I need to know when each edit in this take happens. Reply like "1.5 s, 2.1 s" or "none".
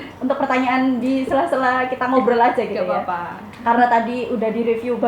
none